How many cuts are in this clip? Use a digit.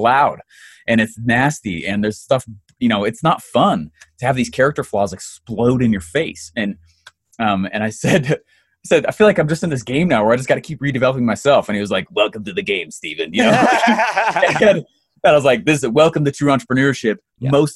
0